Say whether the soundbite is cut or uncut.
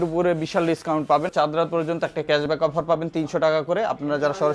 cut